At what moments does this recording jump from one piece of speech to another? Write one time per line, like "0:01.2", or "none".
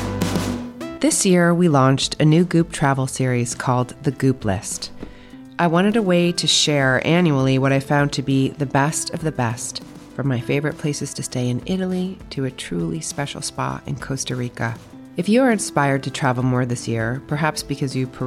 0:00.9